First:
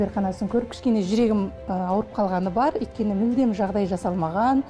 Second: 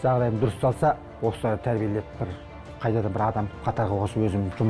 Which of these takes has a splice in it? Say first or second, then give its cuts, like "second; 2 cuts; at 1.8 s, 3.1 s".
second; 1 cut; at 1.1 s